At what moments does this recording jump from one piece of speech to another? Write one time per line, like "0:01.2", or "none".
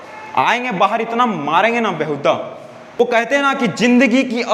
0:03.0